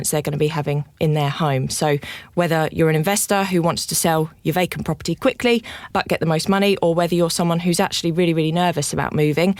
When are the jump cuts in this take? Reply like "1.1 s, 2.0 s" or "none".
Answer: none

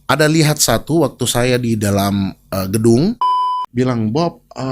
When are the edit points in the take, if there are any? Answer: 3.3 s

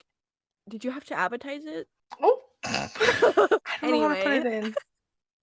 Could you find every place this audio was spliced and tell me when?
3.6 s

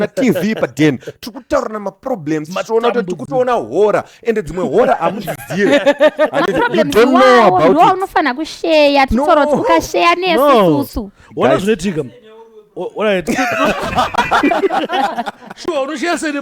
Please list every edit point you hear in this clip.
none

